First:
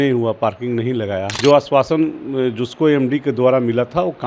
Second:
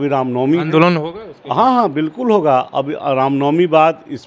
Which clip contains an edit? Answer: first; 1 cut; at 1.3 s

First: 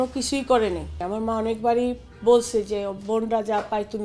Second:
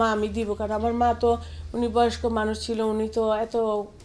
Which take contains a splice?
first; 1 cut; at 1.0 s

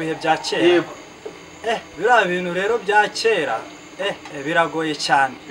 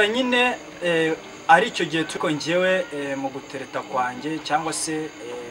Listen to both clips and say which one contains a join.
second; 1 cut; at 2.2 s

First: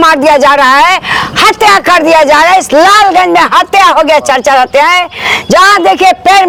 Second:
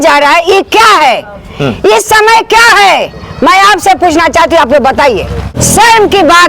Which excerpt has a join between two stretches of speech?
second; 1 cut; at 5.6 s

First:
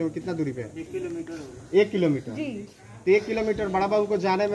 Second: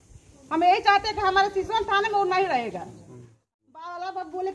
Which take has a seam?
second; 1 cut; at 3.4 s

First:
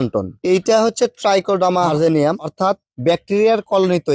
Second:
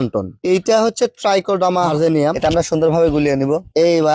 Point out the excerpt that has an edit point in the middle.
second; 1 cut; at 2.4 s

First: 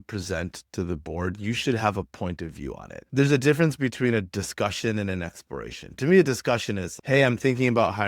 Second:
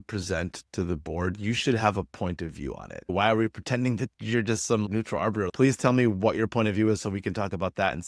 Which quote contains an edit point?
second; 2 cuts; at 3.1 s, 5.5 s

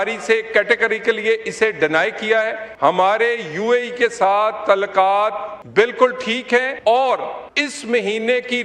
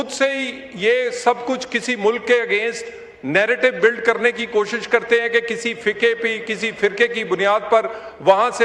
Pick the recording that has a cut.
first; 4 cuts; at 2.6 s, 5.5 s, 6.7 s, 7.4 s

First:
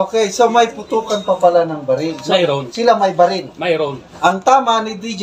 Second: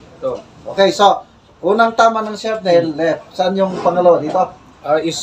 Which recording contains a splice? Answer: first; 1 cut; at 4.0 s

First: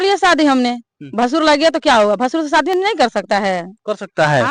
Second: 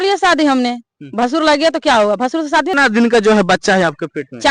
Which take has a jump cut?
second; 1 cut; at 2.7 s

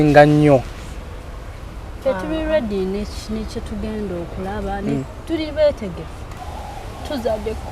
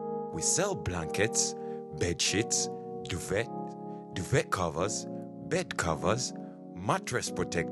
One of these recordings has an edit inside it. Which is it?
first; 1 cut; at 6.5 s

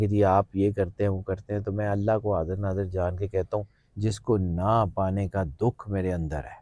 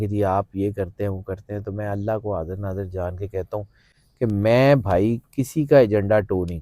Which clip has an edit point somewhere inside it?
first; 1 cut; at 3.8 s

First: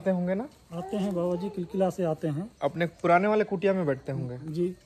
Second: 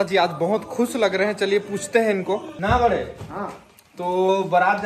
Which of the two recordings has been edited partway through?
second; 1 cut; at 2.5 s

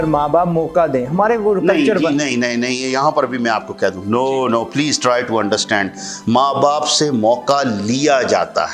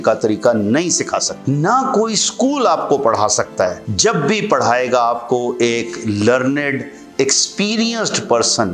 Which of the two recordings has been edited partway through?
second; 2 cuts; at 1.3 s, 3.9 s

